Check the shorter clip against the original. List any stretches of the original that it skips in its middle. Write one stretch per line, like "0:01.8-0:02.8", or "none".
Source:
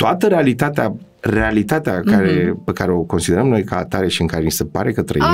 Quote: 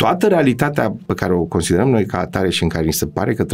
0:01.1-0:02.7